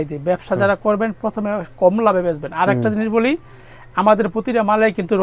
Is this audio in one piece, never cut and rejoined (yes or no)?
yes